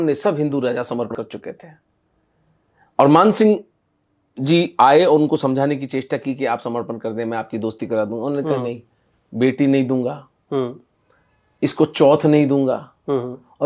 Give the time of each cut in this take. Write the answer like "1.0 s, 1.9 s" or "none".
1.1 s